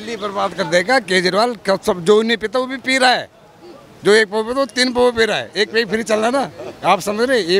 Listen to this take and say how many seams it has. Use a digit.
0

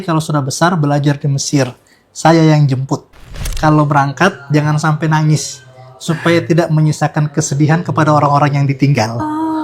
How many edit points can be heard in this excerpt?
1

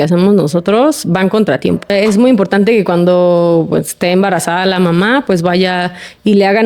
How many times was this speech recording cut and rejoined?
1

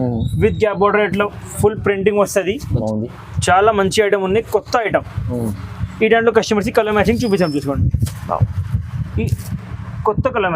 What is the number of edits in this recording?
1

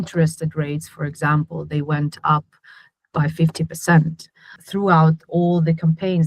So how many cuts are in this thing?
1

